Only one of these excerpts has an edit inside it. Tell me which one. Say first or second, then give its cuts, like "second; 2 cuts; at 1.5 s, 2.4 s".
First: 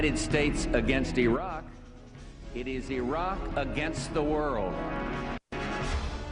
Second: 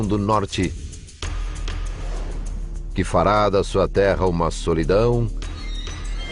second; 1 cut; at 2.0 s